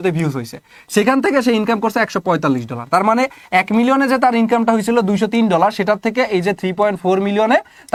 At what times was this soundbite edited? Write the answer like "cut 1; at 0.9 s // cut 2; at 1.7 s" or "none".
none